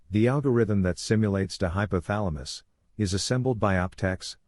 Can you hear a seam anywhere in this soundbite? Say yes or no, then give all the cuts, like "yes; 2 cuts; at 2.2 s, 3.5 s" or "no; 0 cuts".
no; 0 cuts